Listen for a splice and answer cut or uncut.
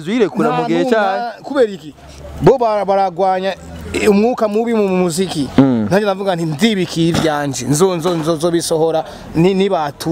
uncut